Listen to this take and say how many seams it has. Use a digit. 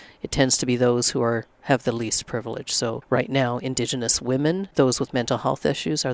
2